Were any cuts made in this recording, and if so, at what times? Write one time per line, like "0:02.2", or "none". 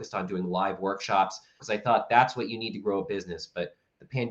0:01.5